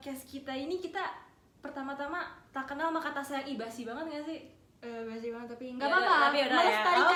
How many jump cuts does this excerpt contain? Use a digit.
0